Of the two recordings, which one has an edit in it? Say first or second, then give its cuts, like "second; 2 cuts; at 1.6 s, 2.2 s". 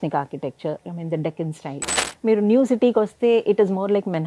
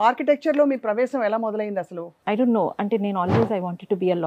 second; 1 cut; at 2.1 s